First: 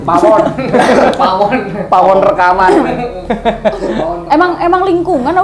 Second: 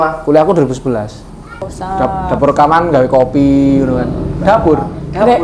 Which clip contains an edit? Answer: second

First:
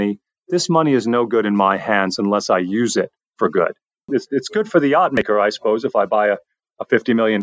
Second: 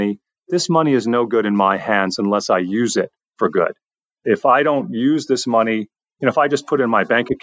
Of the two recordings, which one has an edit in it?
first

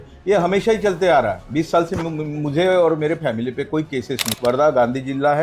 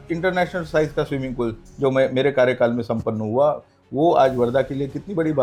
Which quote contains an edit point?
first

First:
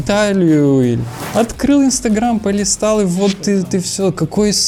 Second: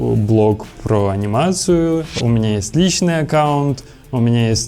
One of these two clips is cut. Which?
second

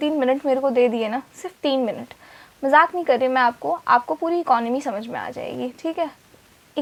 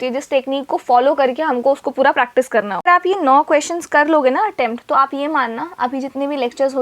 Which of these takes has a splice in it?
second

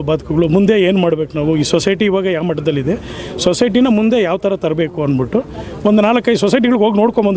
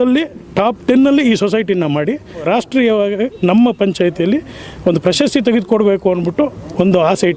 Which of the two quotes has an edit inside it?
second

